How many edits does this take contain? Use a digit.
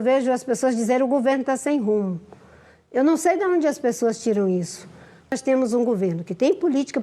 1